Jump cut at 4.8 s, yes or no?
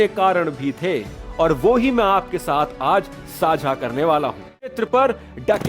yes